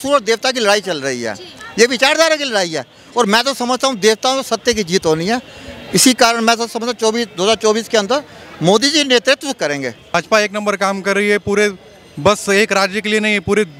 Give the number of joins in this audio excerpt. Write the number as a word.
one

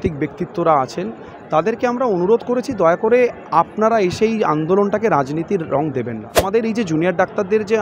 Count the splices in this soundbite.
one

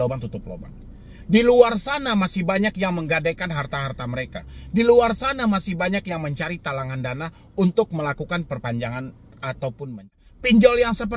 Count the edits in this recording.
one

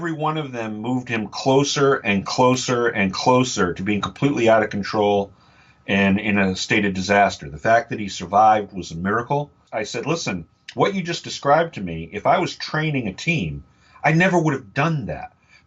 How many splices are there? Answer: one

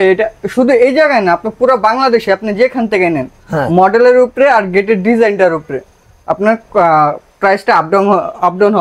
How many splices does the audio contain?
zero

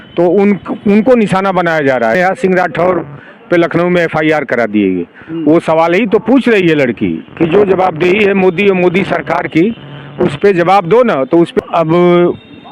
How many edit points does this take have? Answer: two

